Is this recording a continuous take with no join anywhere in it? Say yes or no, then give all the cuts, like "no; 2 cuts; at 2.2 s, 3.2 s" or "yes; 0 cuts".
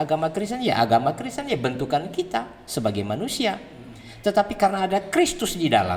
yes; 0 cuts